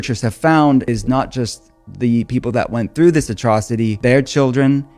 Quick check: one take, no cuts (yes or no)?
no